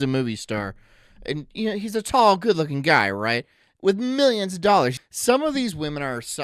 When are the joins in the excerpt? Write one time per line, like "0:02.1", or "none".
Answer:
0:05.0